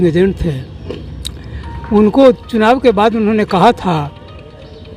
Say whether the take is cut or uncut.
uncut